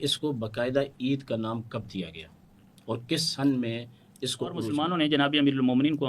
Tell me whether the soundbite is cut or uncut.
cut